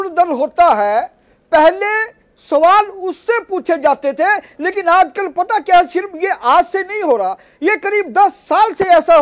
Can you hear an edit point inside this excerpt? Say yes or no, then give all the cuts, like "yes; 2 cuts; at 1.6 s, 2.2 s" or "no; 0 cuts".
no; 0 cuts